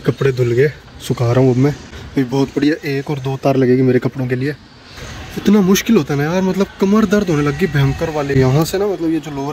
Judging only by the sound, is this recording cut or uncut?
uncut